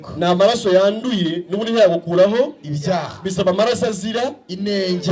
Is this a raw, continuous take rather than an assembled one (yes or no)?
yes